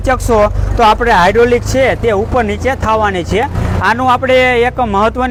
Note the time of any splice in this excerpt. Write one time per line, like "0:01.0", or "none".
none